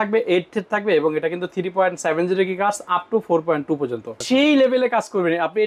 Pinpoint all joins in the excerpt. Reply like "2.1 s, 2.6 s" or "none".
4.1 s

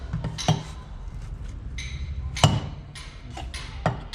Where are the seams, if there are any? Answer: none

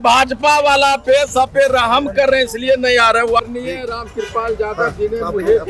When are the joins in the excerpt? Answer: 3.4 s

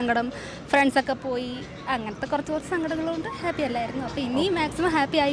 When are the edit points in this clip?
none

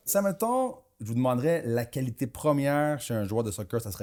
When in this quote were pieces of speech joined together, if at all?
none

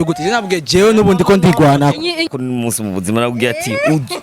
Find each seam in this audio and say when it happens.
2.3 s

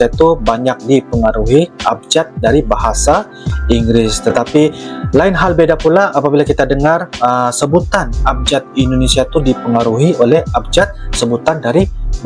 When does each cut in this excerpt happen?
none

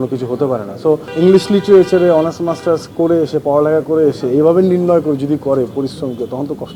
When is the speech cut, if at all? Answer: 1.1 s

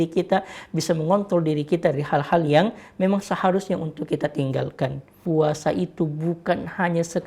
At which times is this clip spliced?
5.2 s

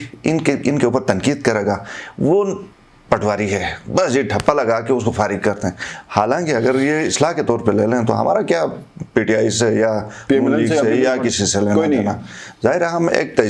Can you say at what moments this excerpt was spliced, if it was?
none

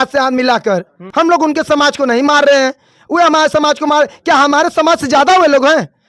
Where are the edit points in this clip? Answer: 1.0 s

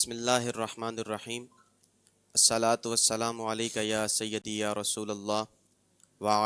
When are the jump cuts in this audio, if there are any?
none

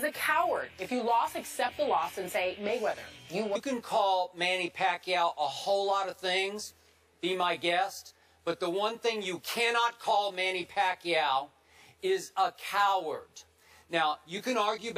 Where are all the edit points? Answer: none

